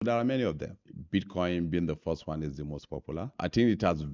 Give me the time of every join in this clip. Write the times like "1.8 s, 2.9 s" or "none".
0.9 s, 3.3 s